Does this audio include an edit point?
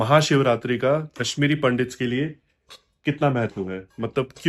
no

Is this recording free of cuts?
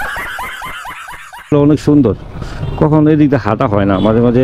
no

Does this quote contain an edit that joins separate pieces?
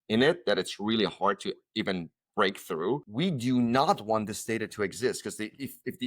yes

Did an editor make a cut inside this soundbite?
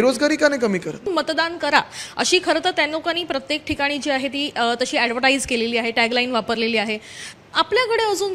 yes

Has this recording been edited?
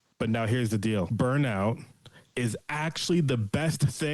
yes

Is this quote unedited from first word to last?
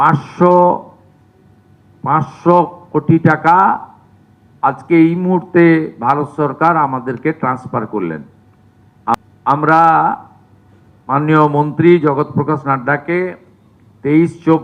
no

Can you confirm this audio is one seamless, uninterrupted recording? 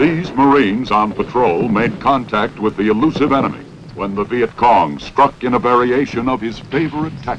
no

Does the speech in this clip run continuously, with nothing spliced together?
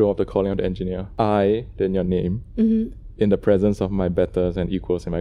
no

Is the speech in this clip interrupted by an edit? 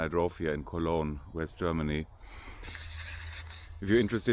yes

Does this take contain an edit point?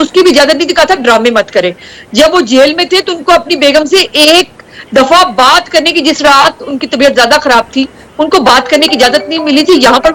no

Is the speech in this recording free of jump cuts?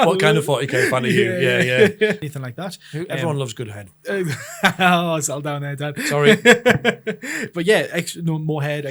no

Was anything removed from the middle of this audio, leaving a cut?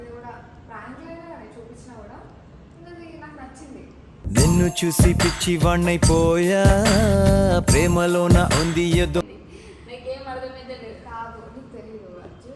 yes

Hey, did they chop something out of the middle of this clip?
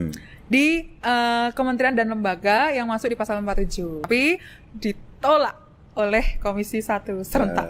yes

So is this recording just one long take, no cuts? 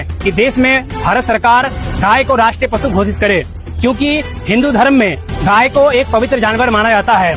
yes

